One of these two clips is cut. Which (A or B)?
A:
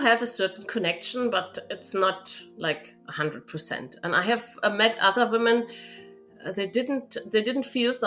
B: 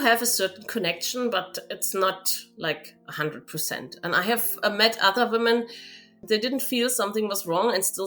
B